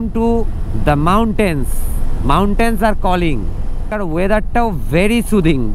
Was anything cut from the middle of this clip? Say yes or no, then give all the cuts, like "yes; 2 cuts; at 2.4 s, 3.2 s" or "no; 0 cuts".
no; 0 cuts